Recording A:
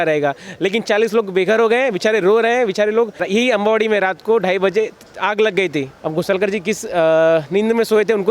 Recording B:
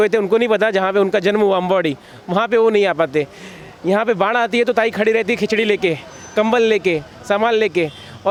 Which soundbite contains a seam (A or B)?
A